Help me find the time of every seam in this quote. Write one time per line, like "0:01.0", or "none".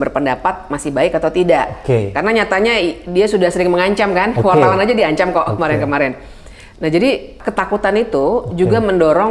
none